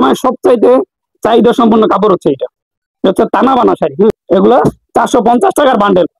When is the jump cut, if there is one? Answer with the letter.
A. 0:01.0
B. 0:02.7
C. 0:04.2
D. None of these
C